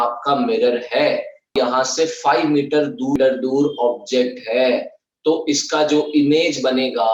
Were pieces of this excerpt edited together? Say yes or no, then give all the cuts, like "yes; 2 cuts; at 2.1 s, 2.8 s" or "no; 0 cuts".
yes; 2 cuts; at 1.5 s, 3.2 s